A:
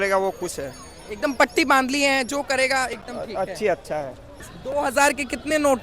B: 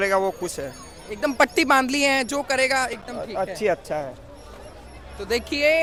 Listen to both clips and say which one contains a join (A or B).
A